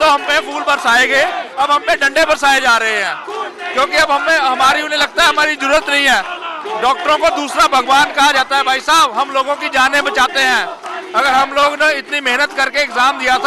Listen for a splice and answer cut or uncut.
uncut